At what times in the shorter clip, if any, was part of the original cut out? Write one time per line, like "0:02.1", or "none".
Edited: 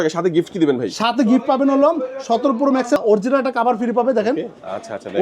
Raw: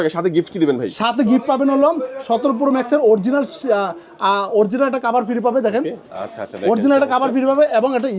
0:03.0